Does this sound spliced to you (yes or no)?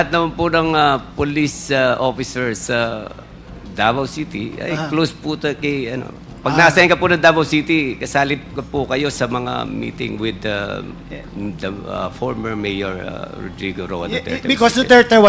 no